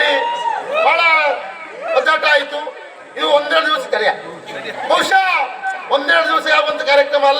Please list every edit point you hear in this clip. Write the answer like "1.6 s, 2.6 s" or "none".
none